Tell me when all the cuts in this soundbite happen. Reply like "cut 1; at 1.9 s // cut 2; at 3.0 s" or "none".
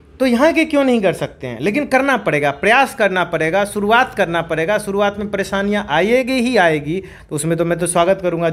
cut 1; at 7.1 s